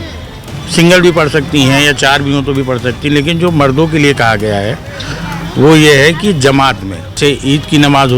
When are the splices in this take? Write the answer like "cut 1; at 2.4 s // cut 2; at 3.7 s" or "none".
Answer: cut 1; at 7.2 s